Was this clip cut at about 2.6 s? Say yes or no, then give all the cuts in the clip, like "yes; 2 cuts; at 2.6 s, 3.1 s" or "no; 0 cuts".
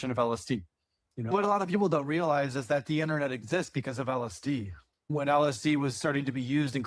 no; 2 cuts; at 1.3 s, 5.1 s